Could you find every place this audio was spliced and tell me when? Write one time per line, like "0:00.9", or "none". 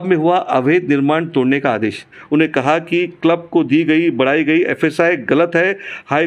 0:02.2